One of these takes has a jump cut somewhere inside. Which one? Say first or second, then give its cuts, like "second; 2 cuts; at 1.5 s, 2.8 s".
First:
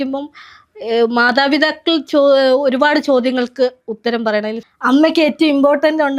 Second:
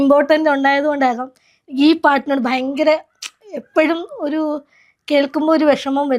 first; 1 cut; at 4.6 s